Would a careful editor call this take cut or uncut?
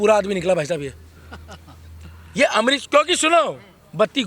uncut